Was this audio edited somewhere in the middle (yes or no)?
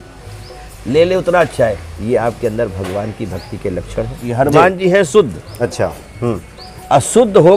yes